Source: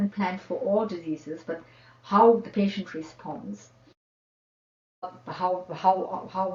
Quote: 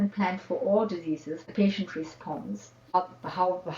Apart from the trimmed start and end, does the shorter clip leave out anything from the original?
yes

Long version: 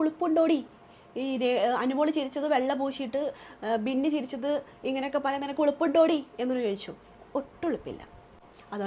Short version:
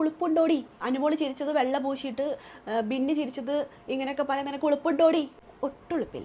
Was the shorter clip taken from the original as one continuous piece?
no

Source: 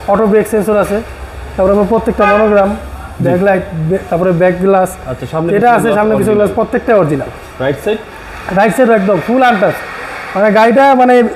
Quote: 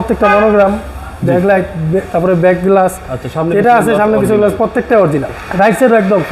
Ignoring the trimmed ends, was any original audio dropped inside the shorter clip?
yes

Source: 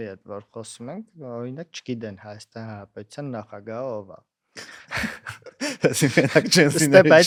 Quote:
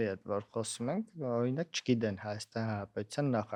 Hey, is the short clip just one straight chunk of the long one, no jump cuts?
yes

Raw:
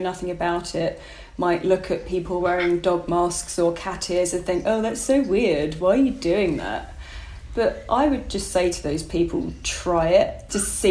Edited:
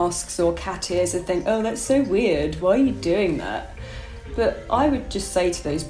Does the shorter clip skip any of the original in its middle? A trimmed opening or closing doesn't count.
no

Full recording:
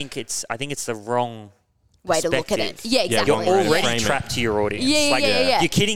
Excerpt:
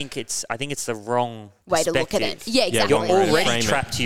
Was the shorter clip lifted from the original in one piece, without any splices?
no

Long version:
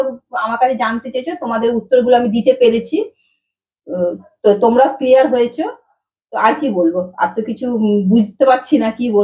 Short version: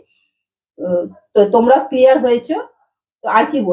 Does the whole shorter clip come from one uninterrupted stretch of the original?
yes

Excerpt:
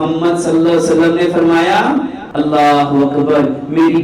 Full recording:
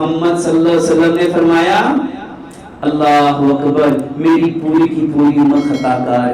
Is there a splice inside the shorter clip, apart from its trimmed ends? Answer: yes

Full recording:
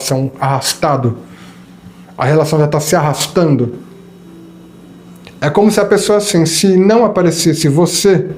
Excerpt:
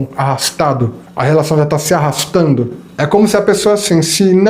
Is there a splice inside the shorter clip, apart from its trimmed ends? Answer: yes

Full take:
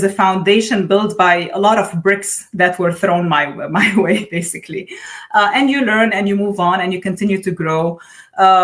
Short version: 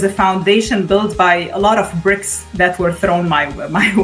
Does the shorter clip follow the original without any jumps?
yes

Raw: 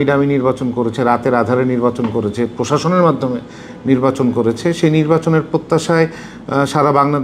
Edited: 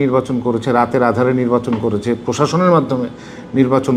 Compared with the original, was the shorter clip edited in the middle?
no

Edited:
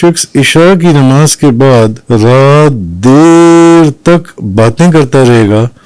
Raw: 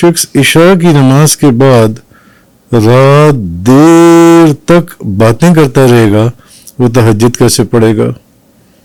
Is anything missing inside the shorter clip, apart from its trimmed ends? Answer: yes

